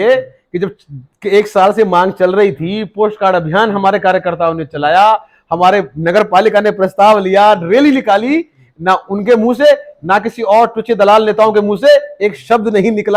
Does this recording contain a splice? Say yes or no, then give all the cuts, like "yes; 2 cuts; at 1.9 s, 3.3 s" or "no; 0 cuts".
no; 0 cuts